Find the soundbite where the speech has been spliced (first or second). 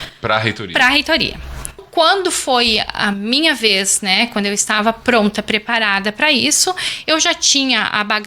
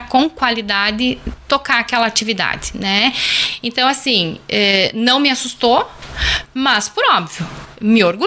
first